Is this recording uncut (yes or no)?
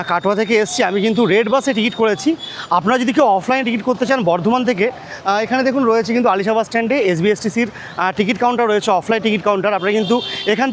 yes